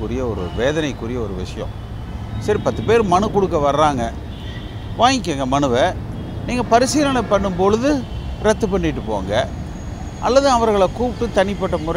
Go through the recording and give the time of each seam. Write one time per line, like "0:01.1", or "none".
none